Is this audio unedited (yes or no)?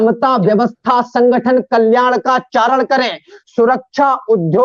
yes